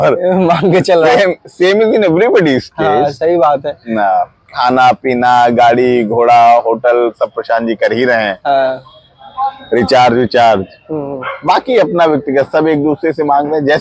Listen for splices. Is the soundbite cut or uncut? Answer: uncut